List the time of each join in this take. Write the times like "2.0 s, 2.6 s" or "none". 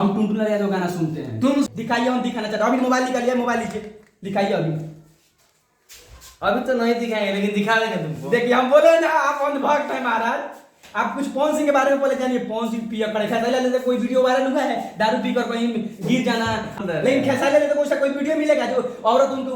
1.7 s, 16.7 s